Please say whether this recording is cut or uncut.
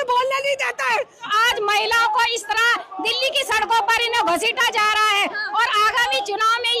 cut